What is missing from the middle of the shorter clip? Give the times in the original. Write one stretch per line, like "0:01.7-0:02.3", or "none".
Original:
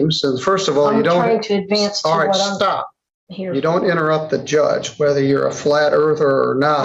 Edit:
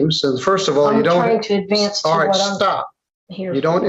none